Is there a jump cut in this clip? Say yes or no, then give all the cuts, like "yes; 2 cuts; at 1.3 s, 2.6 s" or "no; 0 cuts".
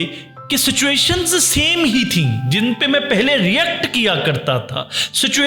no; 0 cuts